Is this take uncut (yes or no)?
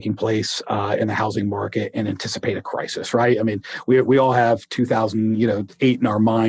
yes